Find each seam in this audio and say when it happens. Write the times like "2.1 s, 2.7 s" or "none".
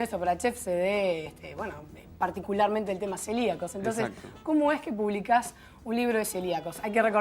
1.7 s